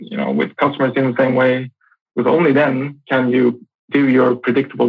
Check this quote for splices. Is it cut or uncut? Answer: cut